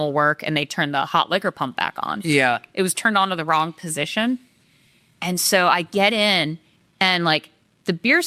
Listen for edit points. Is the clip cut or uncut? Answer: uncut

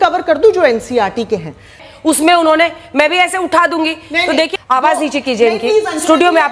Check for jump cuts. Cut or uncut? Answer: cut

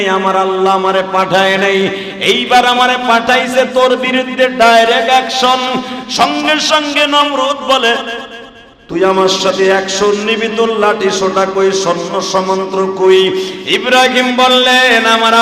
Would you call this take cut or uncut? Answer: uncut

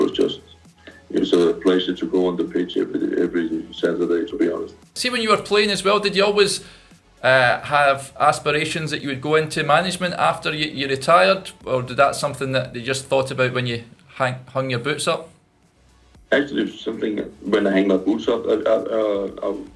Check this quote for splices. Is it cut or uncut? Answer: cut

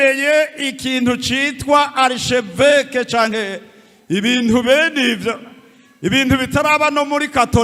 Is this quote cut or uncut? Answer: uncut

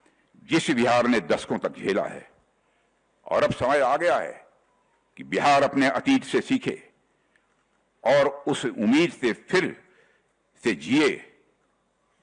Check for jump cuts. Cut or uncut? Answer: uncut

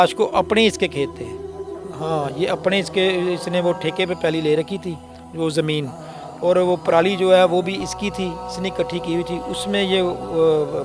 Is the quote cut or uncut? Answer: uncut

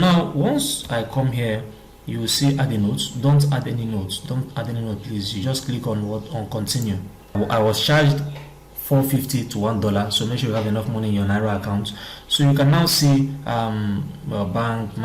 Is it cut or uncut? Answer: cut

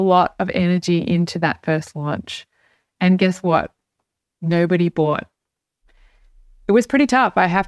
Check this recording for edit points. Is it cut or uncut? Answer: uncut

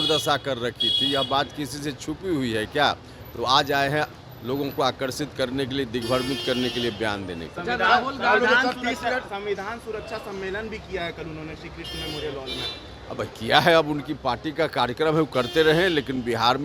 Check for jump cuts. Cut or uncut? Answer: uncut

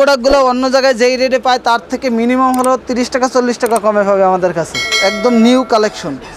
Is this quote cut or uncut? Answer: cut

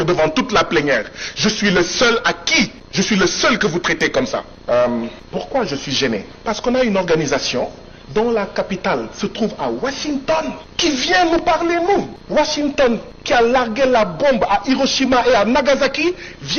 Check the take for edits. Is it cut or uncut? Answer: cut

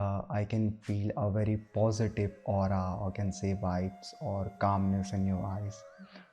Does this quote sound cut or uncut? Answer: uncut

